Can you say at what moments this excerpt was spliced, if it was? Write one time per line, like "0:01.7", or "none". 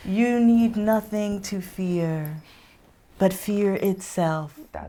none